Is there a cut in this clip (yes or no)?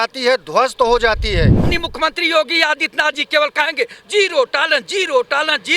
yes